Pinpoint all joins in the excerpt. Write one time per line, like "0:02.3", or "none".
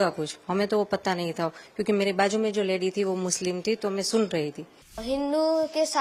0:05.0